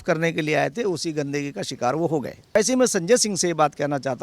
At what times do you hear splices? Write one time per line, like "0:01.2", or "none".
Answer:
0:02.6